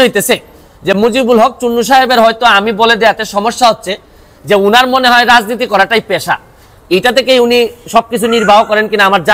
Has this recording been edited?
no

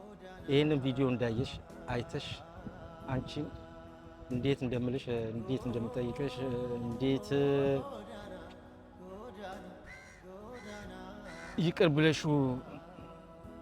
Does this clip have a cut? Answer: yes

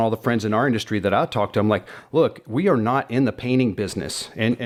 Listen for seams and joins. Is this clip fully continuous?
yes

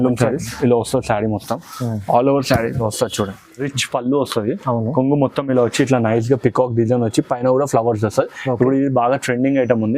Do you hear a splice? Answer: yes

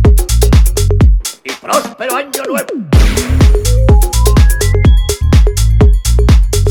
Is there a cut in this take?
yes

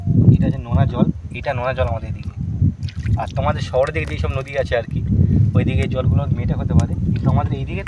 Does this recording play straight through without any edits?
yes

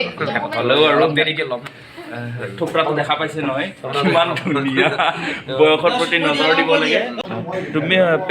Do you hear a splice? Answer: yes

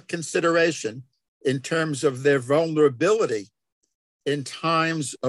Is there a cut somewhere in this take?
no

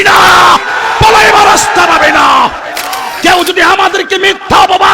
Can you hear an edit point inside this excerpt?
yes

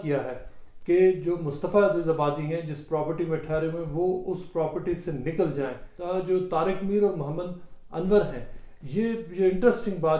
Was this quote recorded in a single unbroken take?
no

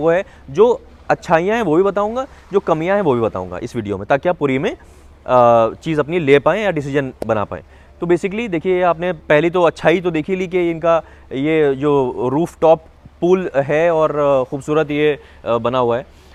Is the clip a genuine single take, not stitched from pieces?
yes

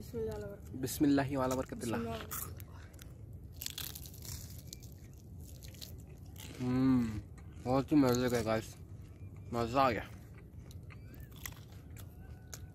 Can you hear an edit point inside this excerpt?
no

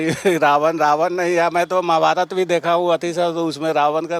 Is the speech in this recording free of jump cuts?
yes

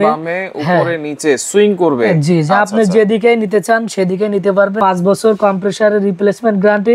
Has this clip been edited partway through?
yes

